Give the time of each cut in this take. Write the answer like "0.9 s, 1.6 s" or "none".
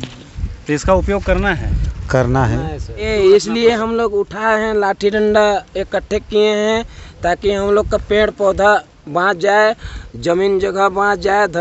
3.1 s